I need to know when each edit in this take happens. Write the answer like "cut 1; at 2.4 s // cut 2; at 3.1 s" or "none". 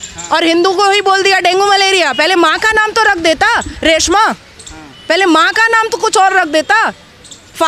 none